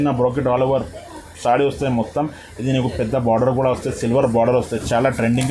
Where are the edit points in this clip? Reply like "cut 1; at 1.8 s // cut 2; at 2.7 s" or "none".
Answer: none